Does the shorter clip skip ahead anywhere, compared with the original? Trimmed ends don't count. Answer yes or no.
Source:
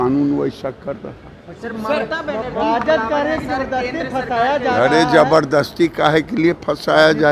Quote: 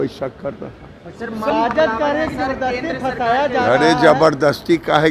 yes